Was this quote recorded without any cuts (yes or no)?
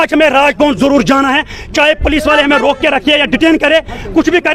yes